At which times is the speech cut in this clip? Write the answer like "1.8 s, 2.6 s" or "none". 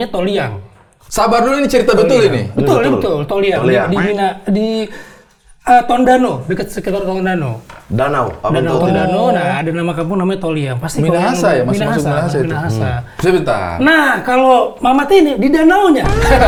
none